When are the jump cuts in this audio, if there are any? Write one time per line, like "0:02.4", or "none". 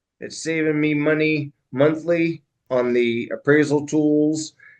0:02.5